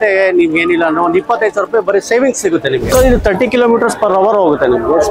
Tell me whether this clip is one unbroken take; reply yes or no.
no